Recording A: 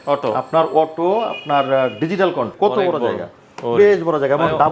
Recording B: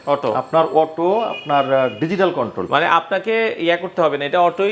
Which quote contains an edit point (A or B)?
A